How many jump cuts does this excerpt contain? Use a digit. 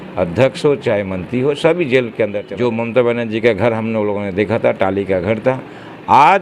1